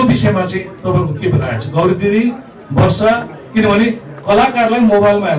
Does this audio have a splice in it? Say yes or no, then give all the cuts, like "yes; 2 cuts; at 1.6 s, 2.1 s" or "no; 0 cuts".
no; 0 cuts